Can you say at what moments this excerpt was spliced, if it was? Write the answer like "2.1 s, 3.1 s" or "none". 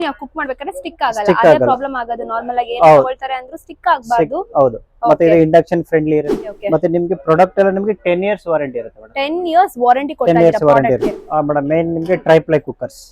6.5 s, 11.1 s